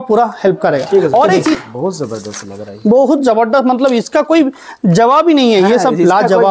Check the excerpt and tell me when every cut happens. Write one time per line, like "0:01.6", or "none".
0:01.5